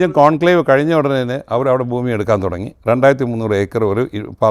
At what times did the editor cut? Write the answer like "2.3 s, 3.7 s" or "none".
none